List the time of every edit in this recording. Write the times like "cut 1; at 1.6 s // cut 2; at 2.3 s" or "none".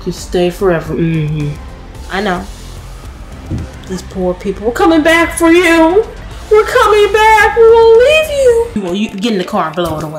cut 1; at 8.7 s